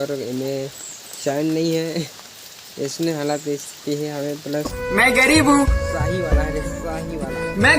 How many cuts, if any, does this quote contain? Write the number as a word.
one